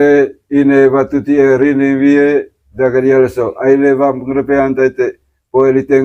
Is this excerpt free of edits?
yes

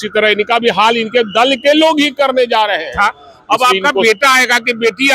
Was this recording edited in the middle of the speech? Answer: yes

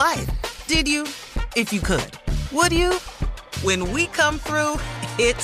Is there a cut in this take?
no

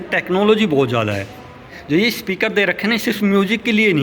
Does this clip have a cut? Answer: yes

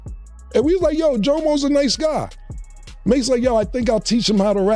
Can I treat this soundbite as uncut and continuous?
yes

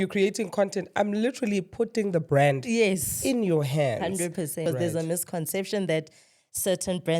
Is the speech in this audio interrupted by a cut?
yes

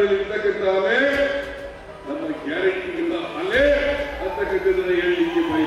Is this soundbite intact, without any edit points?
yes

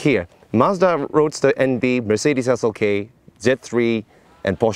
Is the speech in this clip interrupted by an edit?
no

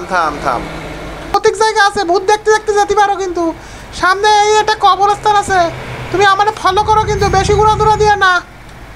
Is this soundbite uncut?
no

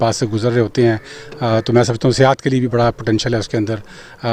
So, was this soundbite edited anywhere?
no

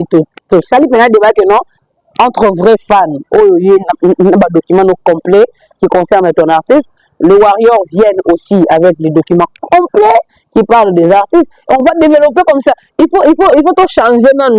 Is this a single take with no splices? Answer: yes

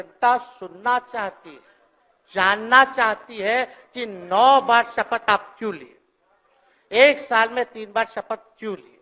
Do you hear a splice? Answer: no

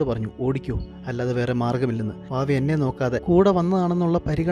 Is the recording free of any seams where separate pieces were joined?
no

